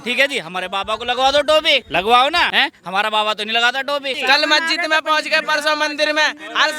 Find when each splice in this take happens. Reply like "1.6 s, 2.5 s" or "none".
1.9 s, 2.5 s, 4.2 s